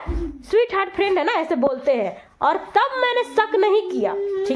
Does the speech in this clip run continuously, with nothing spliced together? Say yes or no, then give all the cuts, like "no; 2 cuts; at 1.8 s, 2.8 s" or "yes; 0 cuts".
yes; 0 cuts